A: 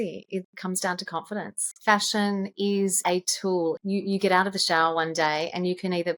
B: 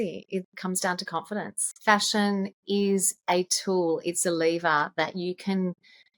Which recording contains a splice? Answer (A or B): A